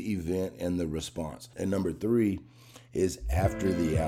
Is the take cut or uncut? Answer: cut